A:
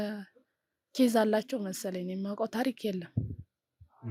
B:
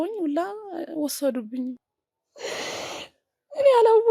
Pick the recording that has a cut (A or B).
B